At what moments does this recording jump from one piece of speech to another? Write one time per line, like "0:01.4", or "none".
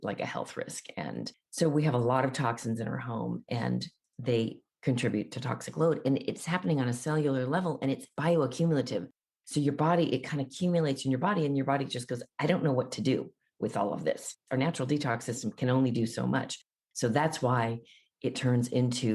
none